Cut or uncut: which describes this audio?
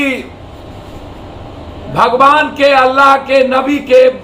uncut